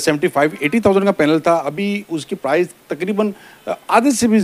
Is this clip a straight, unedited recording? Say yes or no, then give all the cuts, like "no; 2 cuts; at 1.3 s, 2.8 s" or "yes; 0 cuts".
yes; 0 cuts